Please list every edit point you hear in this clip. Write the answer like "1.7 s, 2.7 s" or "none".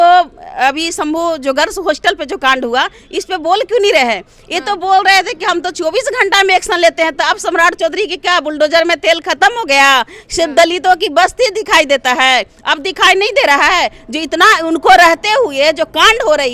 none

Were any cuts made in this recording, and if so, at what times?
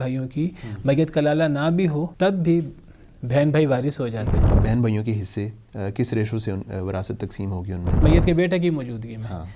2.1 s, 4.5 s, 8.0 s

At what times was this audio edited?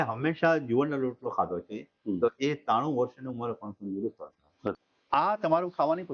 4.7 s

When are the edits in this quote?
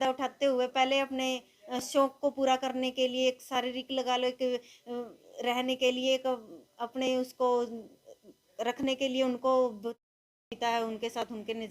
10.1 s

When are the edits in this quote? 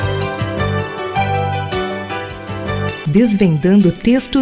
none

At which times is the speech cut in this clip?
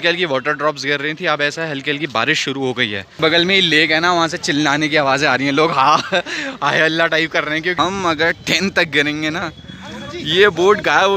3.1 s, 7.7 s

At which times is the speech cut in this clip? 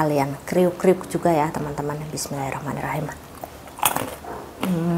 none

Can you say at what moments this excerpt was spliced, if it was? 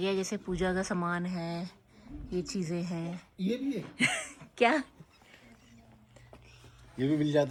none

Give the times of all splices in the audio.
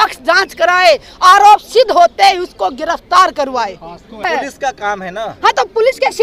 4.2 s

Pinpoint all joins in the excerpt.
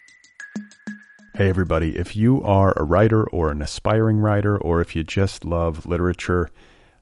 0.9 s

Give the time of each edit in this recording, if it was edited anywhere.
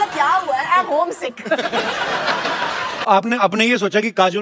3.1 s

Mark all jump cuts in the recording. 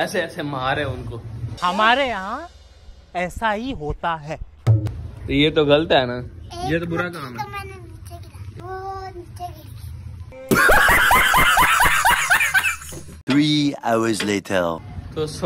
none

